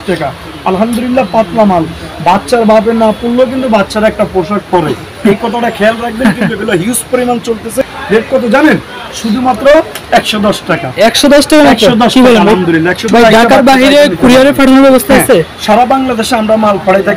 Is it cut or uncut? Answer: cut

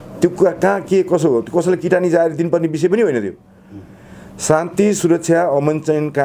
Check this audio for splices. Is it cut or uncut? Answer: uncut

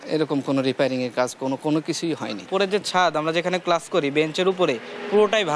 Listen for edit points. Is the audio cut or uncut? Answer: cut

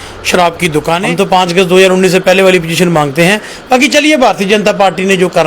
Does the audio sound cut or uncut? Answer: cut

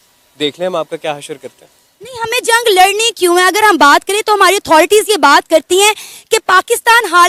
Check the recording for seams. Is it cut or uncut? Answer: uncut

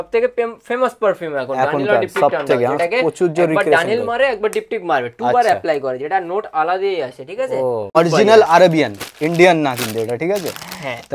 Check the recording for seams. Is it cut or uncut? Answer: cut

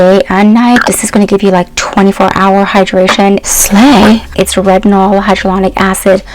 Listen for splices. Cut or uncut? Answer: cut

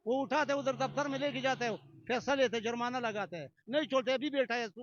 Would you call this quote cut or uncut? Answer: uncut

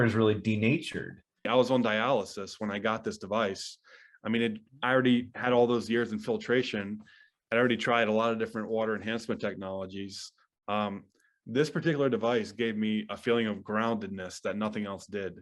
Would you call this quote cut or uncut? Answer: cut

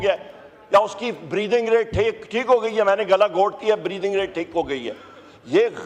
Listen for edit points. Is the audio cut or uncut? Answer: uncut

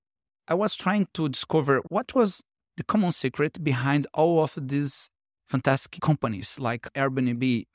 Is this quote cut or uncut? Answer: uncut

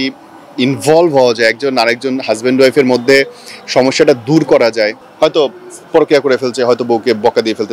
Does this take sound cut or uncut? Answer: cut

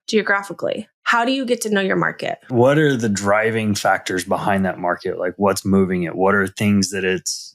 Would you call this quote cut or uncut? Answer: cut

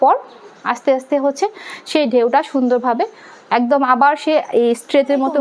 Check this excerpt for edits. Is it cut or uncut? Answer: uncut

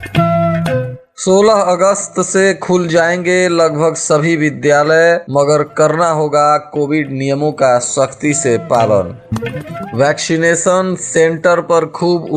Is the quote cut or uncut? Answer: cut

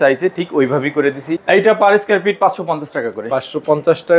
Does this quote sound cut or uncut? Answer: cut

